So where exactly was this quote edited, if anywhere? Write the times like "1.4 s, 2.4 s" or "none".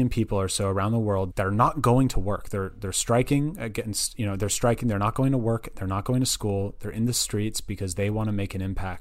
1.3 s